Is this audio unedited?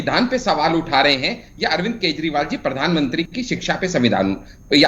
yes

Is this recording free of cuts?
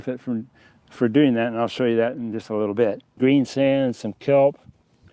no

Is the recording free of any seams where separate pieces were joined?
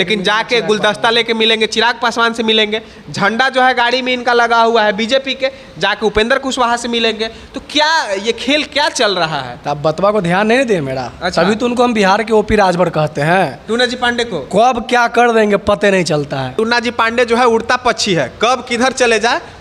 no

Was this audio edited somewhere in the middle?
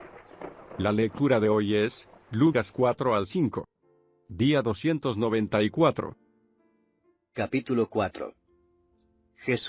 no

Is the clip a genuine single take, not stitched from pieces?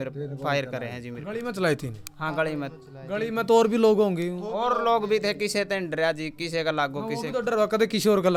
yes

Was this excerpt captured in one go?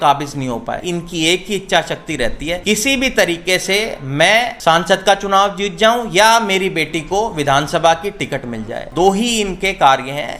no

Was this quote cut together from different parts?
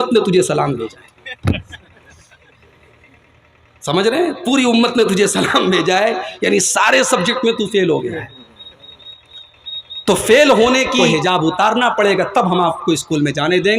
yes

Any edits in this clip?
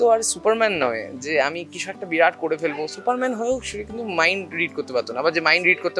no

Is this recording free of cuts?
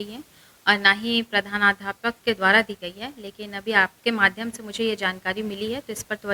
yes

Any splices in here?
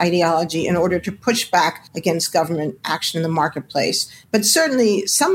no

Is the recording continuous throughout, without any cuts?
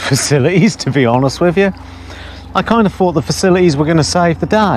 yes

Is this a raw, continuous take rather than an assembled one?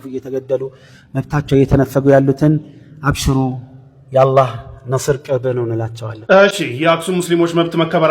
no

